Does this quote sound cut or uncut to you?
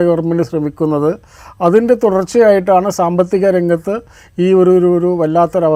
uncut